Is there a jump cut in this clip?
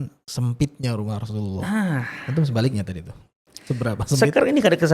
no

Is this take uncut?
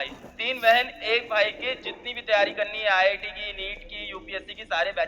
yes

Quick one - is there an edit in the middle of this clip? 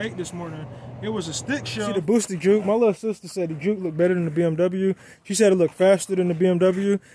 yes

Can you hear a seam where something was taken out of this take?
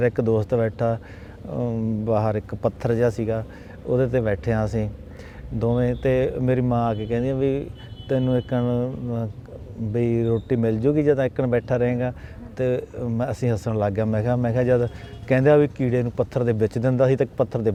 no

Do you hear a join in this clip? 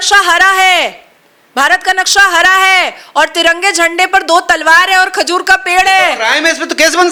no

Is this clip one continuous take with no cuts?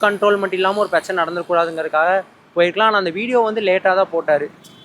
yes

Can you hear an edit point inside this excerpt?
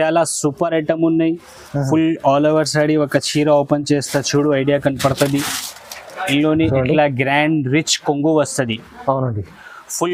no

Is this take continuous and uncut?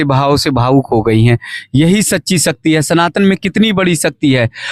yes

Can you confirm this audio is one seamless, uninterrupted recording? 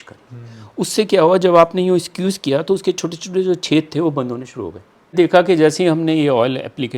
no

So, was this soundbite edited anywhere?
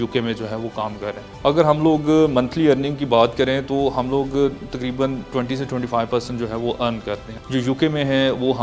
yes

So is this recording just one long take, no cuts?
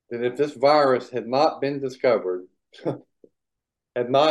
yes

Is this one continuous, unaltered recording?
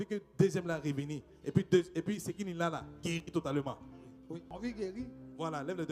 yes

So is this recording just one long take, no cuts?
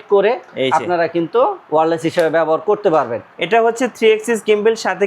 no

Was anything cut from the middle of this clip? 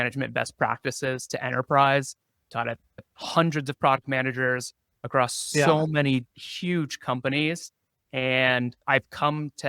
no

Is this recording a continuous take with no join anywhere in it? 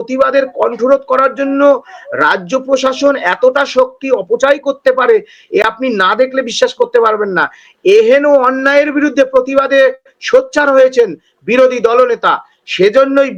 yes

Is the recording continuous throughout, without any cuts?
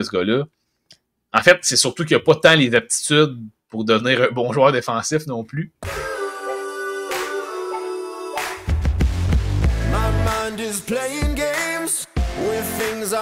no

